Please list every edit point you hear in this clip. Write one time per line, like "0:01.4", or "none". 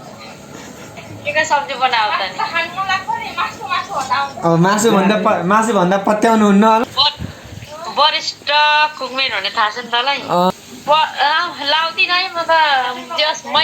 0:01.1
0:06.8
0:10.5